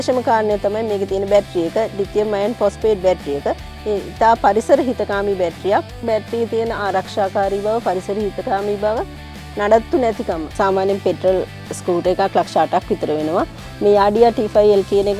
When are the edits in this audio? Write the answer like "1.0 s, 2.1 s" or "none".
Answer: none